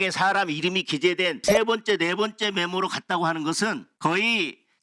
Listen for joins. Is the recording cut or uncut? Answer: cut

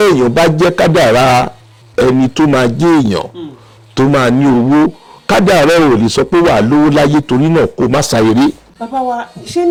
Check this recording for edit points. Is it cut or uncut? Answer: uncut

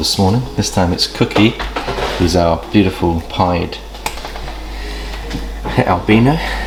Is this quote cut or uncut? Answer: uncut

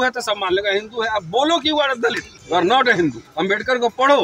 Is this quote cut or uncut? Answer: cut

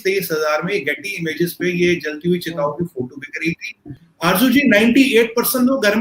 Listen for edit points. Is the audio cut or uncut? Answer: cut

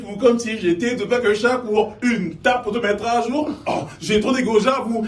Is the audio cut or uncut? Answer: uncut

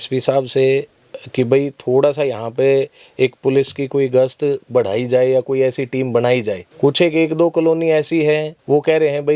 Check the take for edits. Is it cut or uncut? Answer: cut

